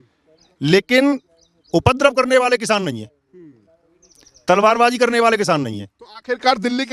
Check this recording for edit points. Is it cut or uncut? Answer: uncut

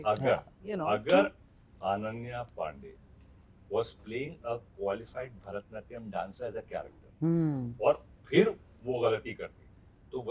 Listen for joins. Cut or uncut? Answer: uncut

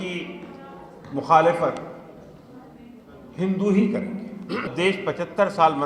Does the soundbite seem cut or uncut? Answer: cut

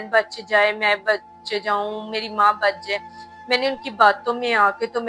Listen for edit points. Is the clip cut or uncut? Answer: uncut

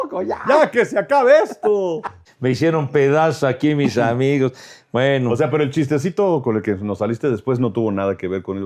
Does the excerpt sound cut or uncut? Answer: cut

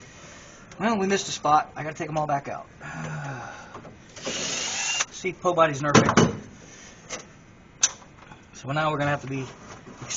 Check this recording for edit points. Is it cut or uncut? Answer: uncut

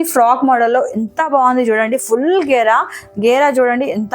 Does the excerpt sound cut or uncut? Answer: uncut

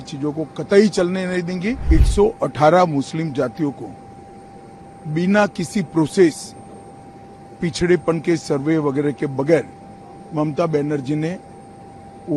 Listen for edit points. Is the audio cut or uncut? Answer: cut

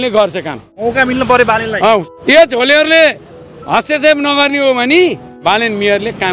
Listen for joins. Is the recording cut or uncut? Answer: cut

